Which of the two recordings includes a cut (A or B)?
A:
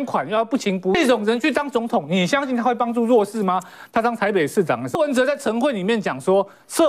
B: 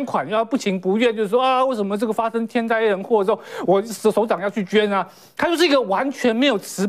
A